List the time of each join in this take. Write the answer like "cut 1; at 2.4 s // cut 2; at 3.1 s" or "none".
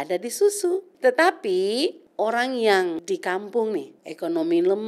cut 1; at 0.9 s // cut 2; at 2.0 s // cut 3; at 3.0 s // cut 4; at 4.0 s